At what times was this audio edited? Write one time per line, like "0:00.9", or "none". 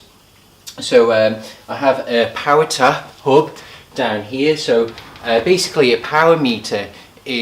0:04.3